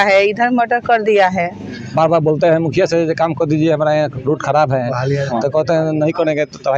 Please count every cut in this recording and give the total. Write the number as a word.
one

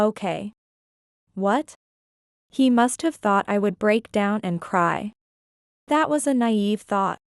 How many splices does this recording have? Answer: one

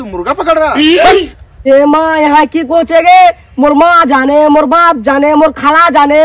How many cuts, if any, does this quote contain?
one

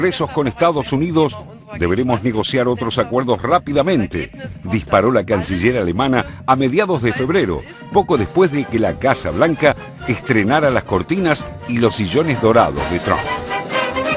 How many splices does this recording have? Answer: zero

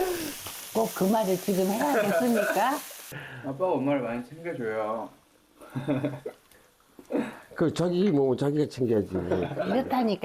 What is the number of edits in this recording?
zero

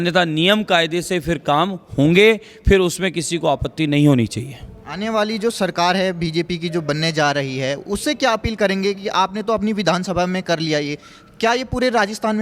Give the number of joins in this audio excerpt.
zero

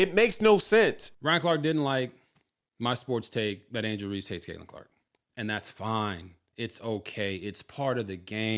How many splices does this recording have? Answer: one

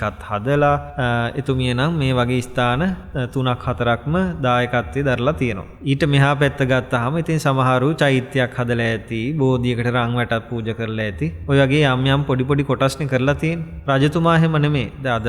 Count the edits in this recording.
five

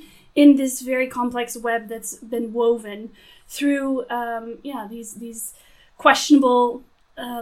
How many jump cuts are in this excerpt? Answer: zero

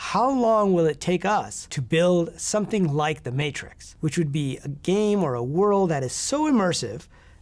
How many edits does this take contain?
zero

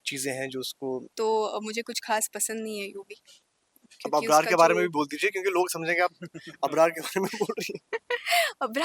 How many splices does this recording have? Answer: one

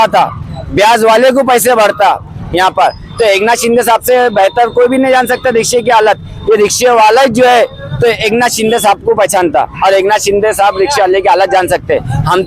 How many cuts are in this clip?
one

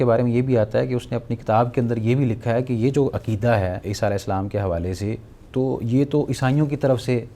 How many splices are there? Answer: one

